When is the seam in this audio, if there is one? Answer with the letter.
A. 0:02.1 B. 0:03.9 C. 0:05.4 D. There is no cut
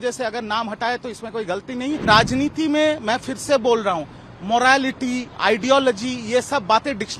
A